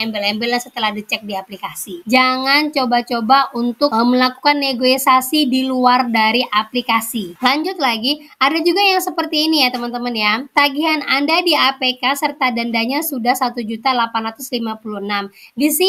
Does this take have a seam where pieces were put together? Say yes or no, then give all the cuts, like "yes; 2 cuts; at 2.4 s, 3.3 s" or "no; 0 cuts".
no; 0 cuts